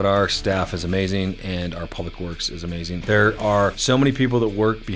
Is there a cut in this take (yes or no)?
yes